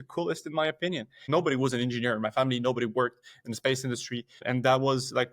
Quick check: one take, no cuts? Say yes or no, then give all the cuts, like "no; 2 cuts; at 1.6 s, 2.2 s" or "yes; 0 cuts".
no; 1 cut; at 1.2 s